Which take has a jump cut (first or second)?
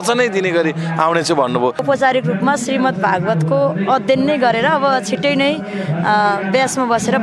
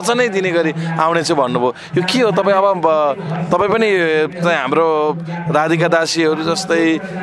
first